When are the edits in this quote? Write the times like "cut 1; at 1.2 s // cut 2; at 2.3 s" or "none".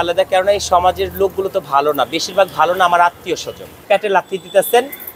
cut 1; at 3.8 s